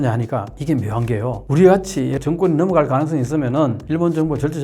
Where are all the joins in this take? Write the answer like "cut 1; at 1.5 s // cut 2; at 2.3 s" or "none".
cut 1; at 2.2 s